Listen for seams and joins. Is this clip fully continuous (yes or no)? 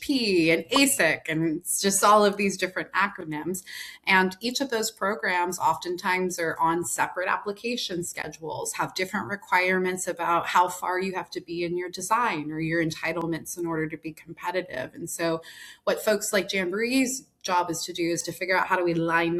yes